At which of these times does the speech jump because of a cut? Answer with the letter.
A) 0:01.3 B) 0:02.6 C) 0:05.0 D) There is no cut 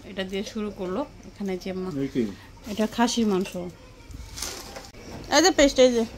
C